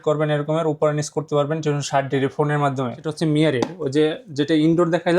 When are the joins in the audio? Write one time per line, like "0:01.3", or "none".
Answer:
0:03.0